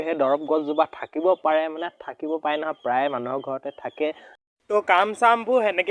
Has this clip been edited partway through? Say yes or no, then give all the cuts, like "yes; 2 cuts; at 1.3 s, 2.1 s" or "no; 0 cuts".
yes; 1 cut; at 4.3 s